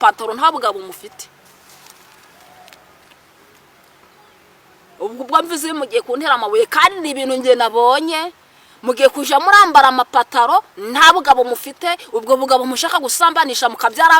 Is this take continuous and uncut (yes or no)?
yes